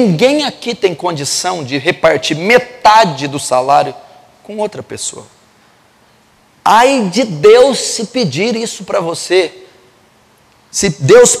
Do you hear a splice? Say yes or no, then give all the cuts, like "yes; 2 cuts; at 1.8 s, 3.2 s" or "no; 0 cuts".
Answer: no; 0 cuts